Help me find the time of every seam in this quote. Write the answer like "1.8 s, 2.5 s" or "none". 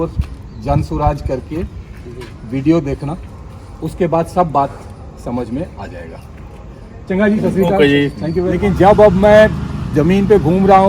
8.1 s

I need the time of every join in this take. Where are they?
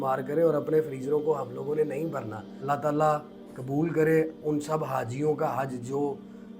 2.5 s

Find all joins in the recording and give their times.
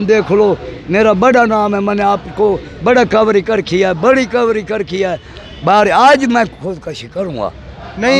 none

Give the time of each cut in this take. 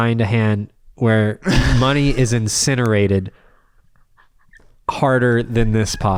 none

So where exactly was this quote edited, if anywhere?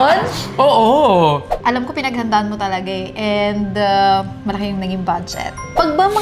1.5 s

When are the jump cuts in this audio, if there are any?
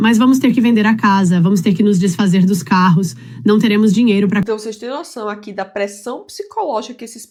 none

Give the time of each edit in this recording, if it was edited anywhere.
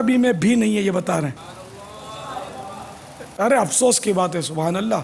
1.4 s

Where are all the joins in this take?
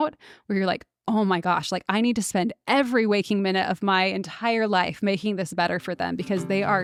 none

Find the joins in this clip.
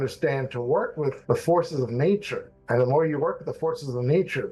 1.2 s

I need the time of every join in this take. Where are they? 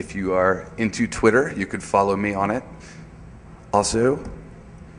2.4 s

